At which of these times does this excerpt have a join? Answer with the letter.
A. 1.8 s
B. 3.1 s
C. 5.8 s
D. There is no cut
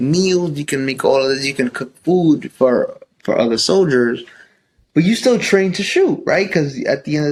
D